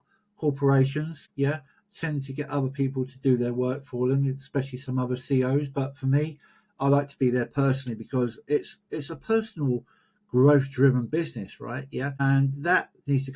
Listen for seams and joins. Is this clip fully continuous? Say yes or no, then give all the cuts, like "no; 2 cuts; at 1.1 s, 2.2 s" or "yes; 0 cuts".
no; 2 cuts; at 1.2 s, 12.2 s